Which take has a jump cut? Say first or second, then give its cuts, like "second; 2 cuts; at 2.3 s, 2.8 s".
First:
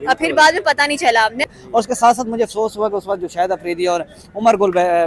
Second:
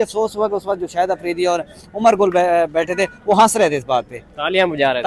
first; 1 cut; at 1.4 s